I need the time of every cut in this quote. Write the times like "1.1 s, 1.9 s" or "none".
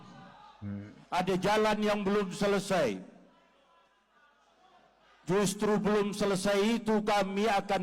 none